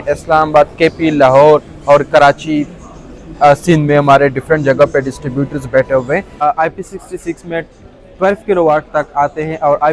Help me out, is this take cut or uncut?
cut